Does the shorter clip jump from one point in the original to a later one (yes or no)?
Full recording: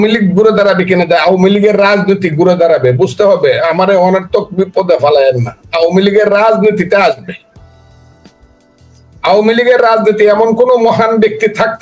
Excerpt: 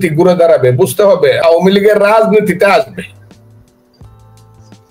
yes